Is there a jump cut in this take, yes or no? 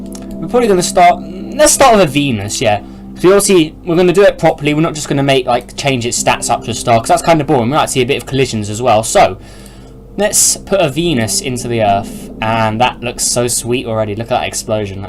yes